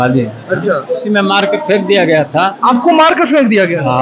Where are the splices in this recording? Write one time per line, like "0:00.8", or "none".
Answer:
0:01.0

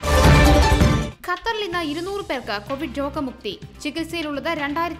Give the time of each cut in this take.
0:01.0

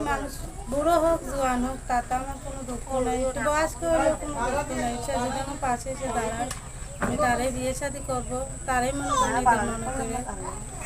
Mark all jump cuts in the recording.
none

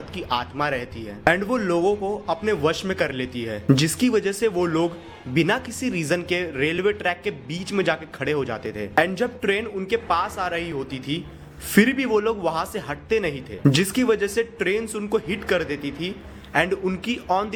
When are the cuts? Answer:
none

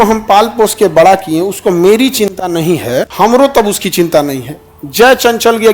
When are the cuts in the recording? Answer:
none

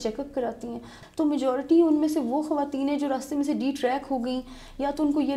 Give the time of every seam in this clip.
0:00.9

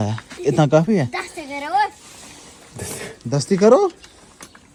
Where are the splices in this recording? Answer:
none

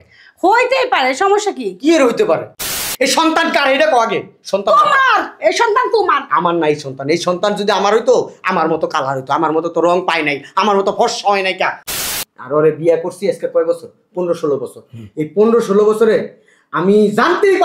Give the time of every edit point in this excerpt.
0:02.7
0:11.8

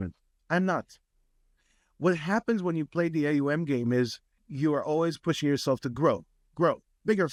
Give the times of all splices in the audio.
none

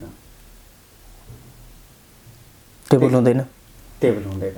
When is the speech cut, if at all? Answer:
none

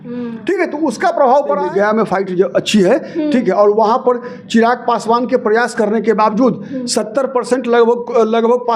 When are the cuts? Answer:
0:01.6

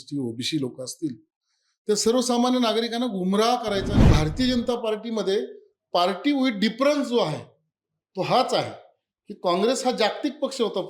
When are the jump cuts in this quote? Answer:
0:04.0

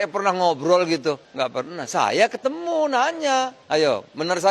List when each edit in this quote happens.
0:01.3
0:03.6

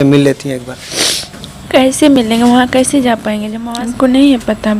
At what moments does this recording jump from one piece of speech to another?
0:03.5

